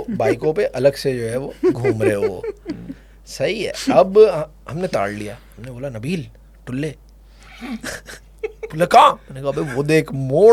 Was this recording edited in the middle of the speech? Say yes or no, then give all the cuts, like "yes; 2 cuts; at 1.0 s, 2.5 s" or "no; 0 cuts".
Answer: no; 0 cuts